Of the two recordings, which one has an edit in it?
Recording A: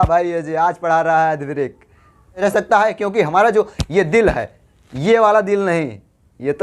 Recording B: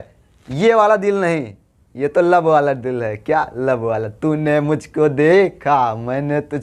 A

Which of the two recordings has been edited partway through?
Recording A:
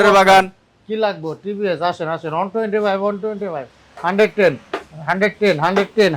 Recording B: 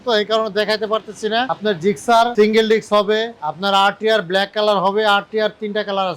B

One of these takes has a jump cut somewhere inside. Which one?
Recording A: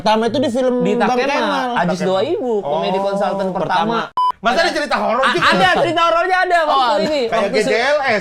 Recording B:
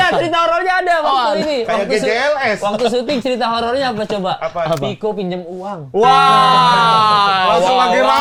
A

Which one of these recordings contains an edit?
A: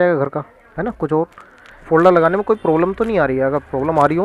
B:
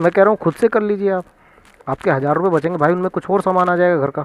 A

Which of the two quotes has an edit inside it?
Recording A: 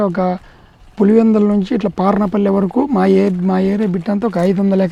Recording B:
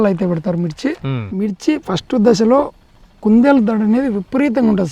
B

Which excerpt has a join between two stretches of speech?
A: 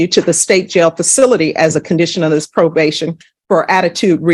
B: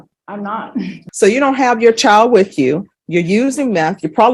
B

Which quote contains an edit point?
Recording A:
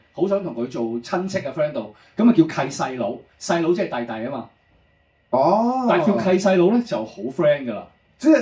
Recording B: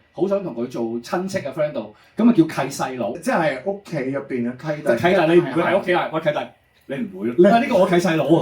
B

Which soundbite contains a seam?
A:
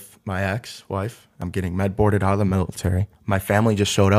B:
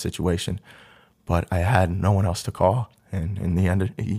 A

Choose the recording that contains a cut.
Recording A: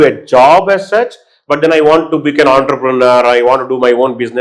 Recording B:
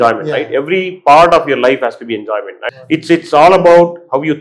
B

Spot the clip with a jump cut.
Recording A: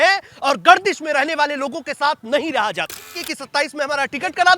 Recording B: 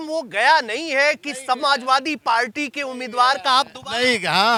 A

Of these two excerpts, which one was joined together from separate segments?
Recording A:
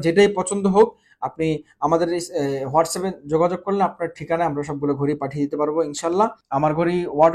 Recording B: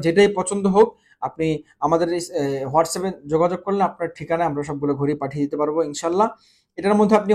A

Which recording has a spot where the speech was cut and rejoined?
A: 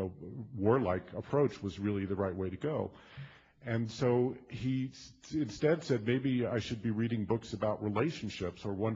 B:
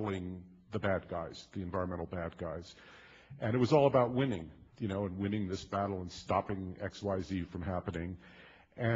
A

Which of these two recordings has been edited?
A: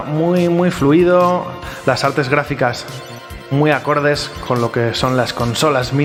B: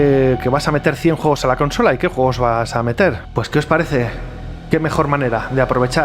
B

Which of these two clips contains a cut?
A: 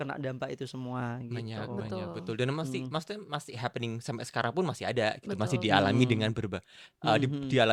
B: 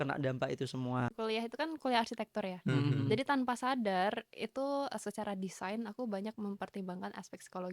B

